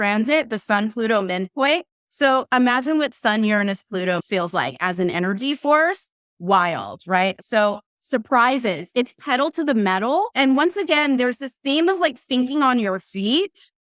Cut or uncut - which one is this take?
cut